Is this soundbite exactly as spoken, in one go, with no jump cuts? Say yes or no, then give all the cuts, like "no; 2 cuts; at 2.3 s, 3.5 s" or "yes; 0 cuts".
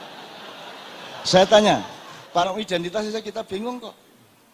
no; 1 cut; at 2.4 s